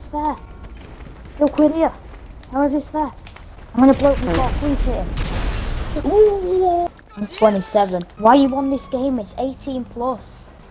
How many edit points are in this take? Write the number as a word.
two